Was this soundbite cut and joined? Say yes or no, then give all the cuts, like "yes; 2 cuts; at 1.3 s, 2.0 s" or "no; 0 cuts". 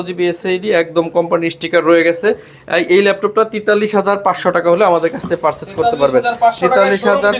no; 0 cuts